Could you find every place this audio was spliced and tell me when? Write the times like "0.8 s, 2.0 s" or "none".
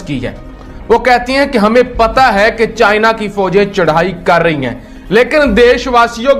none